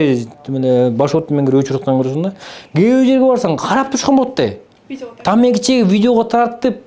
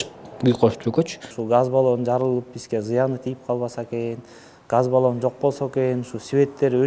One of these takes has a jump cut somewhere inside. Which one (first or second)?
second